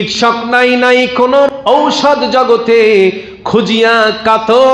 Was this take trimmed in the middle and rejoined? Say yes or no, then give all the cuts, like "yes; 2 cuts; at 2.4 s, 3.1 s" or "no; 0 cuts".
yes; 1 cut; at 1.5 s